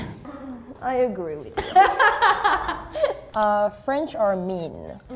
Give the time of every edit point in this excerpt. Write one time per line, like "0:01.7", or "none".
none